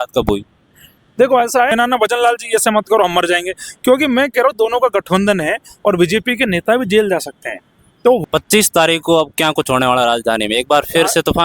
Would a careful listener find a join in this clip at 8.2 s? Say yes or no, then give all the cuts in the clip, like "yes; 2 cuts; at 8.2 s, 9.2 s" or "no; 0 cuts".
yes; 2 cuts; at 1.7 s, 8.2 s